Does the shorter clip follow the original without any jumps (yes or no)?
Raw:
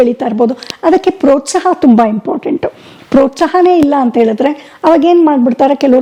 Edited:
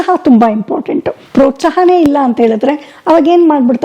no